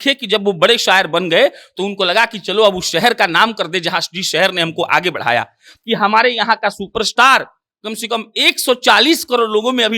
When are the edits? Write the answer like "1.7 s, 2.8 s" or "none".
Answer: 5.7 s